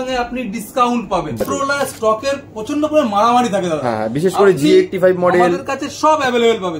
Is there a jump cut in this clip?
yes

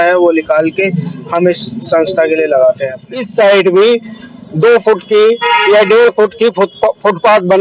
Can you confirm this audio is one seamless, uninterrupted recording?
no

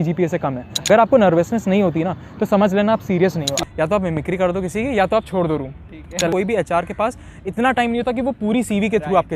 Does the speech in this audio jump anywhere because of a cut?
yes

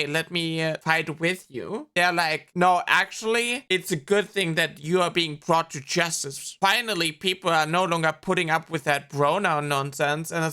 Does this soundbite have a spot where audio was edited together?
yes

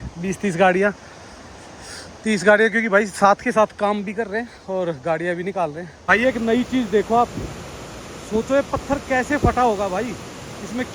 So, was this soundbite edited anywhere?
yes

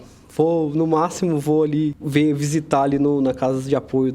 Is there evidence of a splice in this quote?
yes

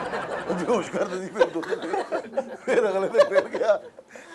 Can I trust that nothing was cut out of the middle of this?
yes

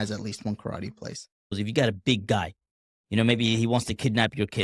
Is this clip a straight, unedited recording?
no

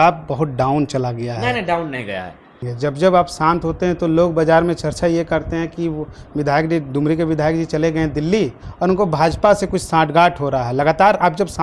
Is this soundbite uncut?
no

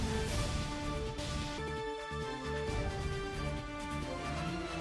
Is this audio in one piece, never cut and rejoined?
yes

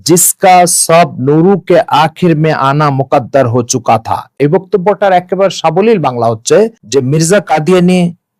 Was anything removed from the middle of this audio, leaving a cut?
no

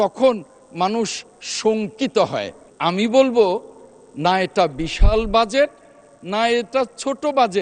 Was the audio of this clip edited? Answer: yes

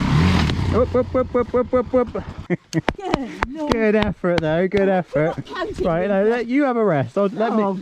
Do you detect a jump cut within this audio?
yes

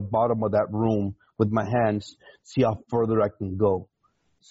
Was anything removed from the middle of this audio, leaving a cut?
no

